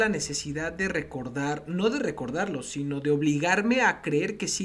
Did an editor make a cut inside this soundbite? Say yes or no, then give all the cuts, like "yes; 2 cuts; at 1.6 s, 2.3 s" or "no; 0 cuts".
no; 0 cuts